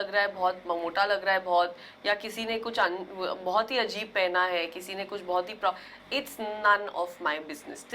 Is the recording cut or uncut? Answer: uncut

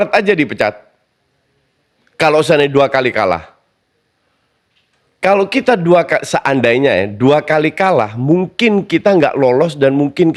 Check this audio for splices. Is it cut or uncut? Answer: uncut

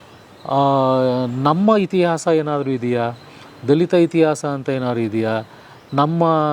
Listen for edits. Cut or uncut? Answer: uncut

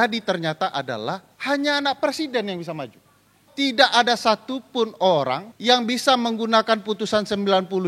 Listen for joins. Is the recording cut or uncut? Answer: cut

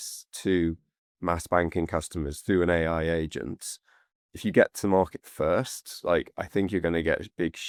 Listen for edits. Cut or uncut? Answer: uncut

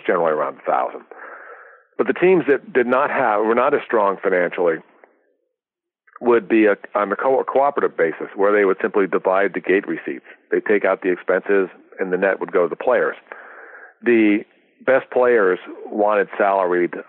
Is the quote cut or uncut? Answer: uncut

